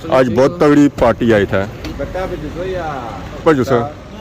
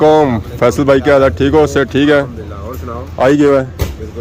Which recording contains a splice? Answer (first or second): first